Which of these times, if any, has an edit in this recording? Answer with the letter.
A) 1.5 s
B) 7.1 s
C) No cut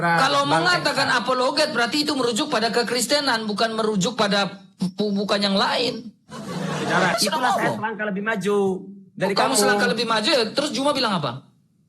B